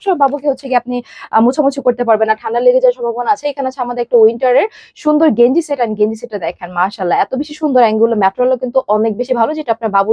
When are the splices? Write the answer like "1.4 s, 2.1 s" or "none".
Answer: none